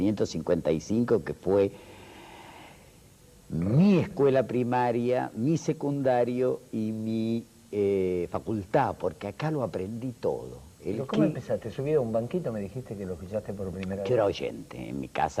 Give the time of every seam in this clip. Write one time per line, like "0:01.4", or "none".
0:02.9